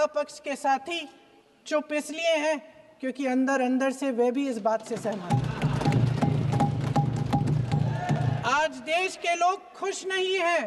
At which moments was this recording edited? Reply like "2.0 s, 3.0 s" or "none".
none